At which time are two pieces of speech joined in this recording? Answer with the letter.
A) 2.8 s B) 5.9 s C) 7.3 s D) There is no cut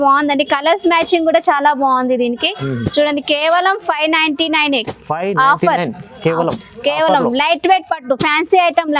D